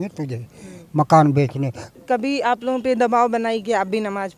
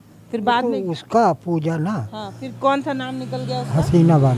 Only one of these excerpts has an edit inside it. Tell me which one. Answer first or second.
first